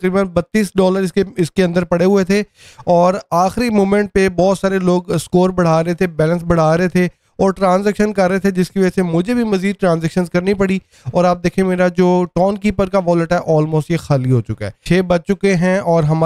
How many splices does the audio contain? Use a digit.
1